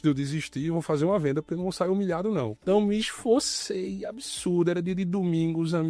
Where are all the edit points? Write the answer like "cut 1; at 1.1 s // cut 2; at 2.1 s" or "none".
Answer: cut 1; at 2.5 s